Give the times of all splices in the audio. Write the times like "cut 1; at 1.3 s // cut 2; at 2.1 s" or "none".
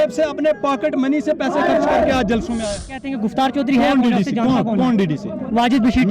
cut 1; at 3.0 s